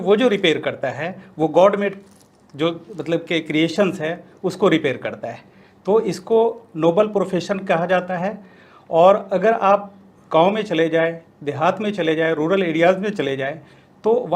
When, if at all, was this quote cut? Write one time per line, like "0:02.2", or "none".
none